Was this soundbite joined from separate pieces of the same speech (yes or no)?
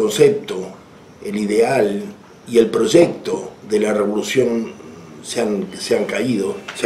no